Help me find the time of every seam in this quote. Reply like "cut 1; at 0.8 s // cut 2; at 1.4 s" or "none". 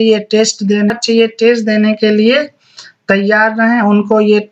cut 1; at 1.0 s